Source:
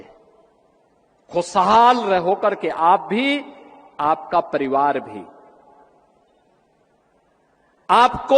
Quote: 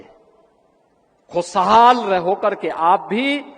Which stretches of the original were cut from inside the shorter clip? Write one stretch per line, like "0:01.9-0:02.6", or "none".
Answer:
none